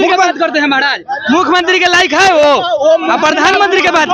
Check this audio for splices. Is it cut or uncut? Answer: uncut